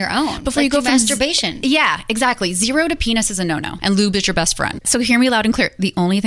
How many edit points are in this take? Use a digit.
2